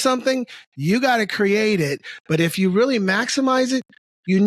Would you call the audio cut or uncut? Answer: uncut